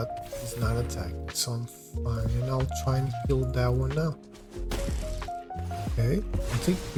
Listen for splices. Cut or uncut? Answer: uncut